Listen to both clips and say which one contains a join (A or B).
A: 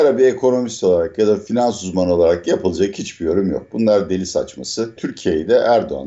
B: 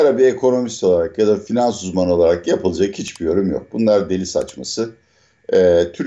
A